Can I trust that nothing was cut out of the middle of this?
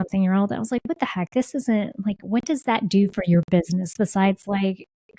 yes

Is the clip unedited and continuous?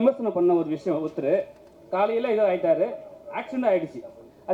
yes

